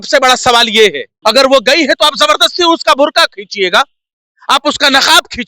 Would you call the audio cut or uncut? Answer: cut